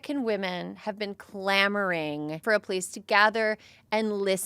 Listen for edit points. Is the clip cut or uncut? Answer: cut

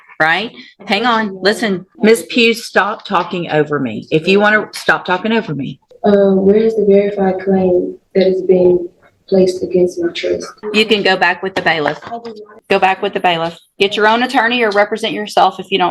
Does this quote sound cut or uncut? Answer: cut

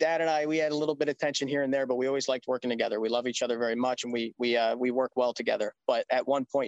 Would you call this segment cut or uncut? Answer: uncut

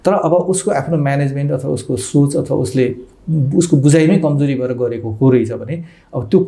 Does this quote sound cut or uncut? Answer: uncut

